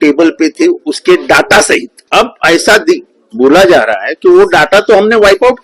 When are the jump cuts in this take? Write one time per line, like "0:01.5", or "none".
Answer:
0:02.0